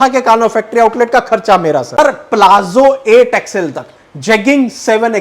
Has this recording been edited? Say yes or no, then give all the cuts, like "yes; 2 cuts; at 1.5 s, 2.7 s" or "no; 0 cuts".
yes; 1 cut; at 2.0 s